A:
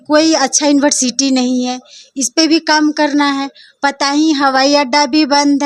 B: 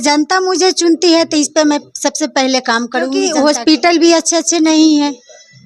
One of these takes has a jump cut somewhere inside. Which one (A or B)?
B